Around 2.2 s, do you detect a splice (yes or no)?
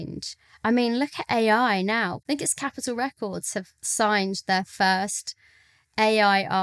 yes